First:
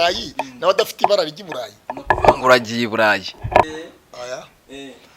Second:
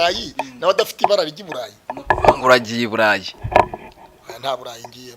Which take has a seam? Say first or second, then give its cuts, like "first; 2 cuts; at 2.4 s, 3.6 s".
first; 1 cut; at 3.6 s